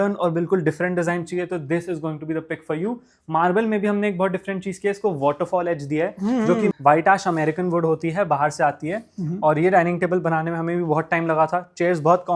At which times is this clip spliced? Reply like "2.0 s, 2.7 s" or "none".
6.7 s